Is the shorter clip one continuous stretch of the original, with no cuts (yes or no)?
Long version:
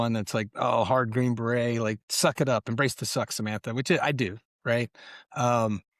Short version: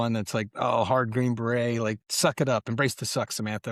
yes